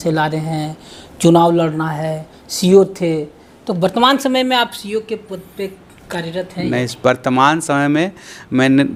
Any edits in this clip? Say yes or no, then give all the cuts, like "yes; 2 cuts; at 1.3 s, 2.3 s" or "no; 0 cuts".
no; 0 cuts